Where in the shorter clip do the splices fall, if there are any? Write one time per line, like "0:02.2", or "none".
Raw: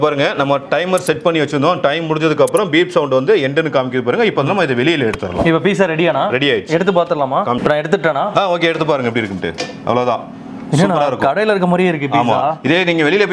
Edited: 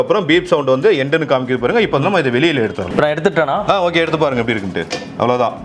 0:02.9

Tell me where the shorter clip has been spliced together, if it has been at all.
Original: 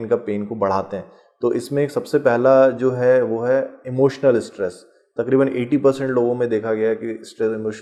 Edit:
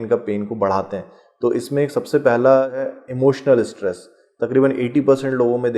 0:02.7

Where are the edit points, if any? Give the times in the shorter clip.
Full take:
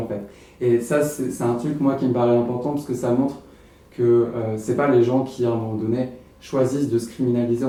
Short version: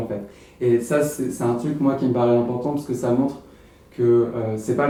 none

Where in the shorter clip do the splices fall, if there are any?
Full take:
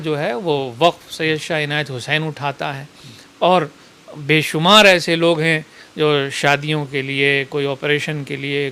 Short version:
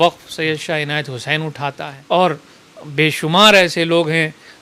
0:01.9

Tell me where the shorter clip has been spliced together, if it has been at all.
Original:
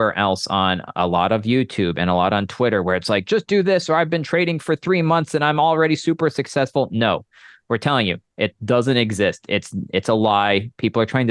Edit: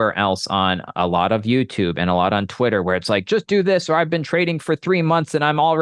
none

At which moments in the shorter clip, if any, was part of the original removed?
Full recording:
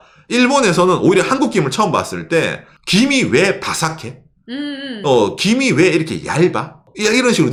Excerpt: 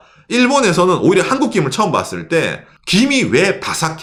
none

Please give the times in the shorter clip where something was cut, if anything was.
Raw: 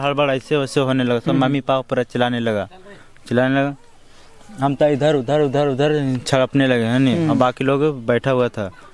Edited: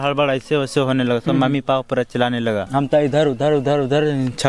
0:02.7

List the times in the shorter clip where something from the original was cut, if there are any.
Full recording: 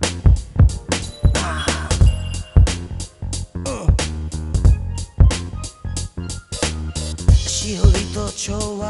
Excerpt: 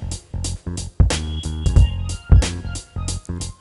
none

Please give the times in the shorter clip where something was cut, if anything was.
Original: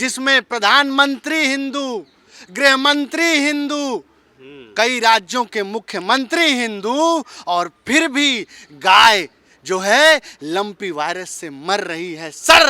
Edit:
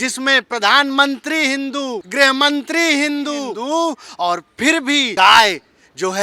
0:02.0
0:03.5
0:05.1

